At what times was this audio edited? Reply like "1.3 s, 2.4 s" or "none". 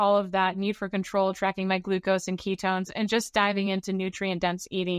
none